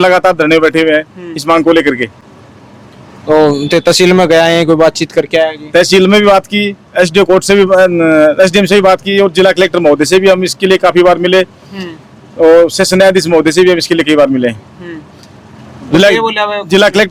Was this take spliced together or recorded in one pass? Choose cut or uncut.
uncut